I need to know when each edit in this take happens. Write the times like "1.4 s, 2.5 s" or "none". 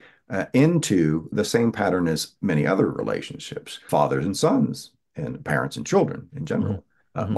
1.3 s, 3.8 s